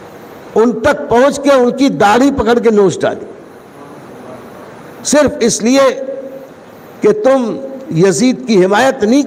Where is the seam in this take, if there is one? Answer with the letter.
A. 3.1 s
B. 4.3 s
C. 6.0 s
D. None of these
D